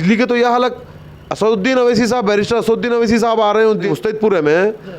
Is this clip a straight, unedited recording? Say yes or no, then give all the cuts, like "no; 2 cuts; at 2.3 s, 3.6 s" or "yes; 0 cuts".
no; 1 cut; at 3.9 s